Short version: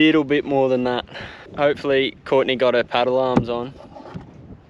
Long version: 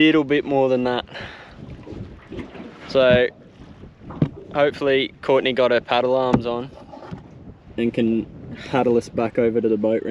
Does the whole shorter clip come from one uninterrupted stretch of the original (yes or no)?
no